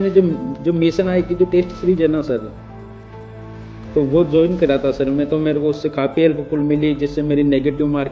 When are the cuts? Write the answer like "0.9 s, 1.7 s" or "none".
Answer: none